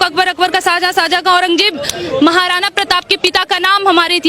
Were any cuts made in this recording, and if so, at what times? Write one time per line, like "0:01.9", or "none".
none